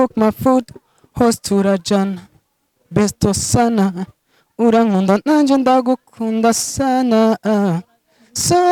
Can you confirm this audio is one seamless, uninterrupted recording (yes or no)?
yes